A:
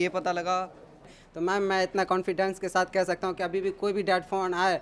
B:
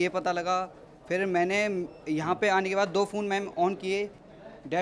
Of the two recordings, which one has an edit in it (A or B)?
A